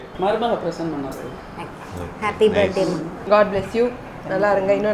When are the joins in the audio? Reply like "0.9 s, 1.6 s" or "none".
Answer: 3.1 s